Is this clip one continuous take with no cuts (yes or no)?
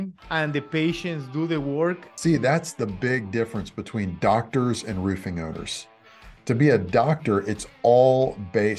no